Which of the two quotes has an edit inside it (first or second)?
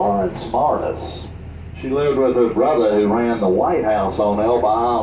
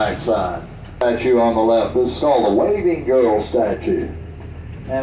second